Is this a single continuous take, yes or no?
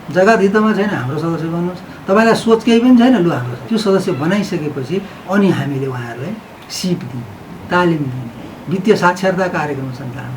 no